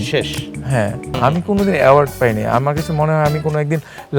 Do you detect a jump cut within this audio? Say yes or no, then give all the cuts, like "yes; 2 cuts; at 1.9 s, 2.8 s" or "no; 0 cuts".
yes; 1 cut; at 1.2 s